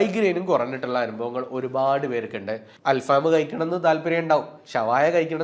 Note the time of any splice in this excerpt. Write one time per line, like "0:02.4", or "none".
0:02.7